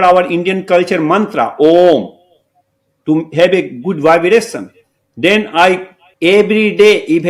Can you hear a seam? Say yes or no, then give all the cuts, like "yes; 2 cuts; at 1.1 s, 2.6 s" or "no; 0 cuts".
no; 0 cuts